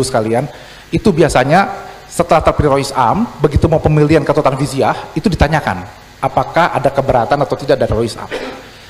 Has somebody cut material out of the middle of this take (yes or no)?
no